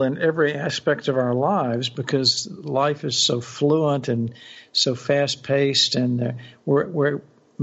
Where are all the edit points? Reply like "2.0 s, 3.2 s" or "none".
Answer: none